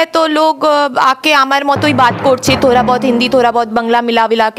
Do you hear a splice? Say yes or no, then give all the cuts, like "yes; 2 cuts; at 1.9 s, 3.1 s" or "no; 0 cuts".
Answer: no; 0 cuts